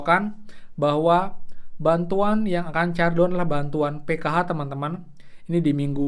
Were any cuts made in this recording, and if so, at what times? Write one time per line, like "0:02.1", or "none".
none